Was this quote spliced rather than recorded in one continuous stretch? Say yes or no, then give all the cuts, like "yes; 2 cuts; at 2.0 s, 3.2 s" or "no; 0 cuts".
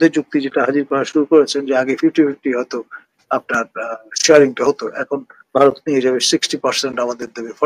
no; 0 cuts